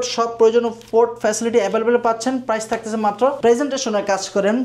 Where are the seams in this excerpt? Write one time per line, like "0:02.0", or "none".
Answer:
0:03.4